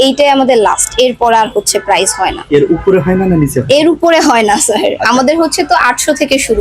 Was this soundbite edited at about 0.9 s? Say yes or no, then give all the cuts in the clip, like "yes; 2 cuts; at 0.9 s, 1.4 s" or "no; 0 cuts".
no; 1 cut; at 2.4 s